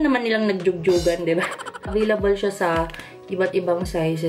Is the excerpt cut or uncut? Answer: cut